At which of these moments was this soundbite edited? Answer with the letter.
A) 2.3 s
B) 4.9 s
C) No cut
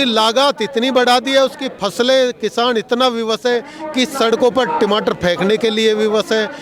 C